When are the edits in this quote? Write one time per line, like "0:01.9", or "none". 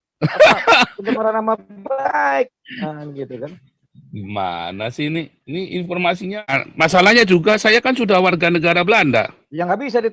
0:06.6